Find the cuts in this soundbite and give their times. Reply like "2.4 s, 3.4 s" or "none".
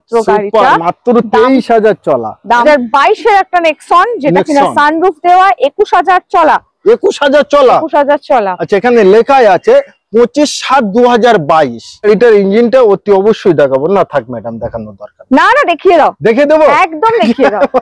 2.6 s, 11.9 s